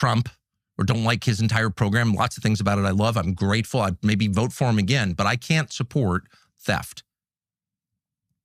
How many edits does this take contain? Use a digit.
0